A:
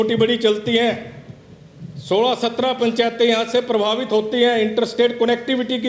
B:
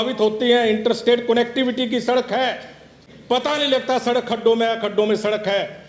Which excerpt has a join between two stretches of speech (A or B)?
B